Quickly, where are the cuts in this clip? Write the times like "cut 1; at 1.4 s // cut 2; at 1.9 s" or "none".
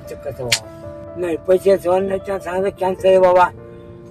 cut 1; at 1.0 s